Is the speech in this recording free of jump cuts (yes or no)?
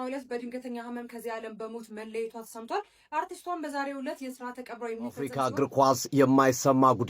no